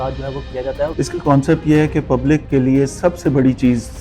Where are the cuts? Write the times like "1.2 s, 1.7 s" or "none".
0.9 s, 2.5 s